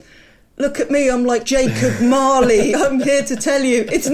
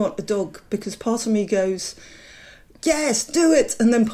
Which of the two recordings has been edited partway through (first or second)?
first